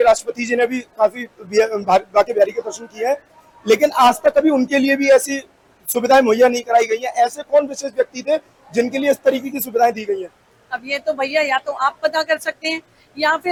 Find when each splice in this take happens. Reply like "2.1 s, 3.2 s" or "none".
none